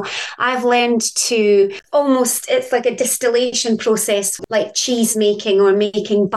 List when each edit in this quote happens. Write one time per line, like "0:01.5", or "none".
0:01.8
0:04.3